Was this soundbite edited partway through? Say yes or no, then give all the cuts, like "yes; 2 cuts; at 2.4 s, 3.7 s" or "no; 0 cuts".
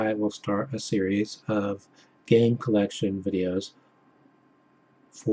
yes; 1 cut; at 1.0 s